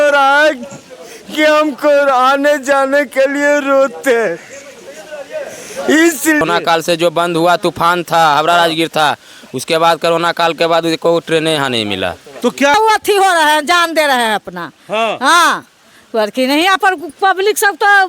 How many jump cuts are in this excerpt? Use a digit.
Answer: 2